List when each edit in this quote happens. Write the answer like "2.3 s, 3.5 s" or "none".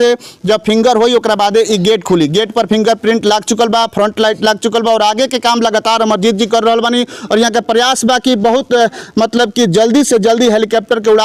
none